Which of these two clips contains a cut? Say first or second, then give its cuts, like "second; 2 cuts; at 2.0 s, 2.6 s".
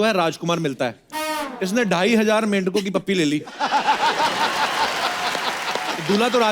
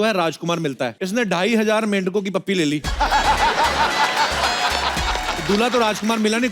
second; 1 cut; at 1.0 s